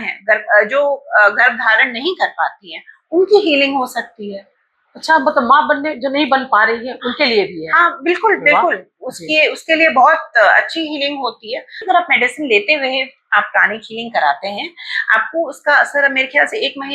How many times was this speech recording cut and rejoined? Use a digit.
1